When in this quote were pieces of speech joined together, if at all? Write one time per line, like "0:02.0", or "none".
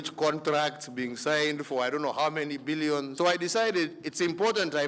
0:03.1